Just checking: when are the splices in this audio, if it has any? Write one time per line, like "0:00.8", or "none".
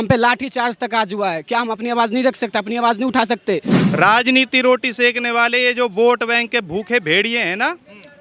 0:03.8